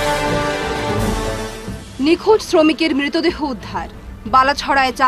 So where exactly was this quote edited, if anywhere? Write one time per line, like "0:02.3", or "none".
none